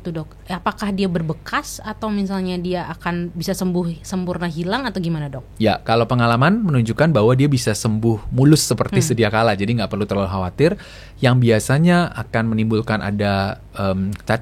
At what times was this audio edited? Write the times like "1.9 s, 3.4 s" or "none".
none